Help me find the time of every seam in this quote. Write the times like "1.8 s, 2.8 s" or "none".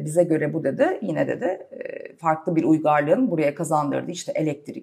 none

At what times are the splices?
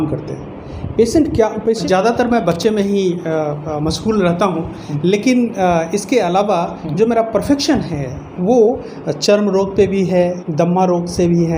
1.8 s

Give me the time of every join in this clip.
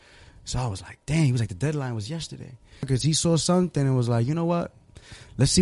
2.9 s

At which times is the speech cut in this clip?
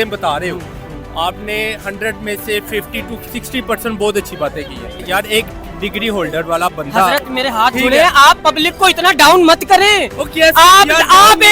5.0 s

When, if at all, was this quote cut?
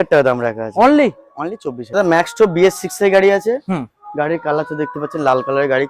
1.8 s

